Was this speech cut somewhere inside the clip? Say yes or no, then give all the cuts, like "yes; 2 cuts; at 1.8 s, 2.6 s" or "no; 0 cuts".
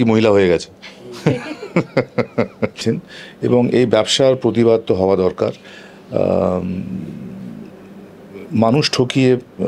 yes; 1 cut; at 2.8 s